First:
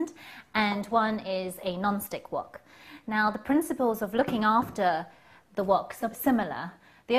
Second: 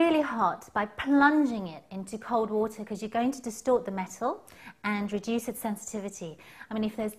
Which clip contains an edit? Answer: first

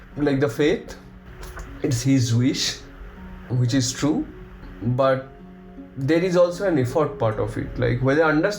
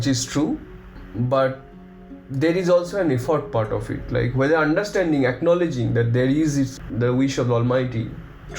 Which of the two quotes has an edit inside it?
first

